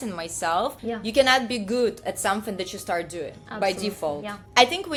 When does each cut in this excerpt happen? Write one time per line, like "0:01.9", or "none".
none